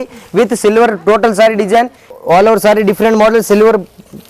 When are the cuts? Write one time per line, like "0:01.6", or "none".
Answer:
0:02.0

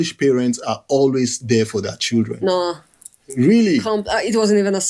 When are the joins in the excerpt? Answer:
none

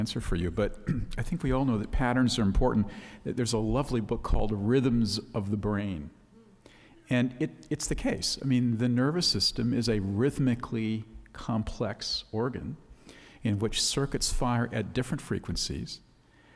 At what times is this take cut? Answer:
0:13.8

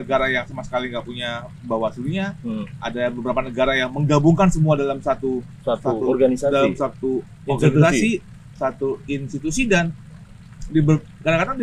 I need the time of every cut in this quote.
none

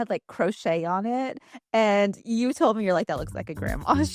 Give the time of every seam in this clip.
none

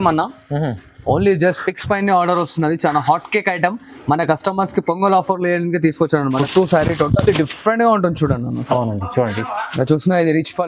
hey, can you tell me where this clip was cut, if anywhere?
0:06.4

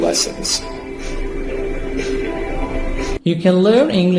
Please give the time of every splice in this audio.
0:01.0

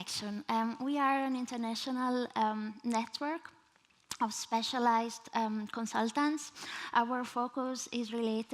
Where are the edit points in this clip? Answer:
0:05.3

